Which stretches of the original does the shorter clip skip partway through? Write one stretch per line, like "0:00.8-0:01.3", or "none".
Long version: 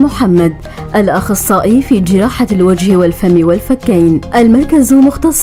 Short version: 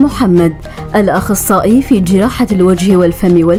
none